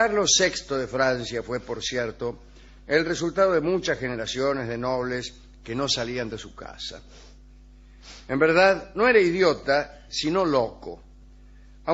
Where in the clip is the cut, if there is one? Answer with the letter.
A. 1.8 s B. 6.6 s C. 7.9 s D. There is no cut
A